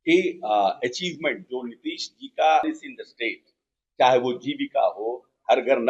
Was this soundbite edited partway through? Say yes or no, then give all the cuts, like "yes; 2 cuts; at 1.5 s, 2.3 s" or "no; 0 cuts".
yes; 1 cut; at 2.6 s